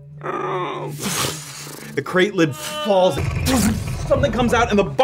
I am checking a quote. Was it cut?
yes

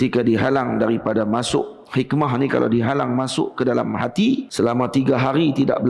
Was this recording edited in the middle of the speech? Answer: yes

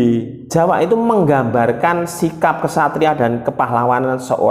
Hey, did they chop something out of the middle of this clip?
no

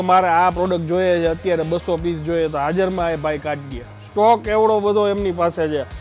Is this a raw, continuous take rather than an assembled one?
yes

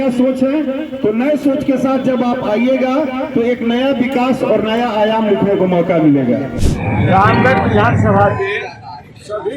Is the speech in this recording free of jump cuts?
no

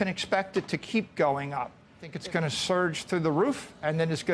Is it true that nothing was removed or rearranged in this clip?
no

